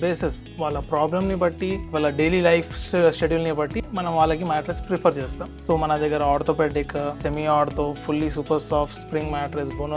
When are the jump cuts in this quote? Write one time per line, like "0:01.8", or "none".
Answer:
0:01.9
0:05.4
0:07.2